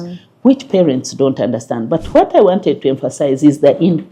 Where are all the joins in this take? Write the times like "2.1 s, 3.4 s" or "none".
none